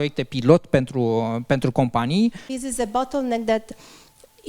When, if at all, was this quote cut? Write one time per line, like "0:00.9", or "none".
0:02.5